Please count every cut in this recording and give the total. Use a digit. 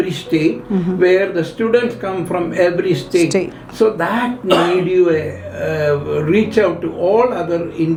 0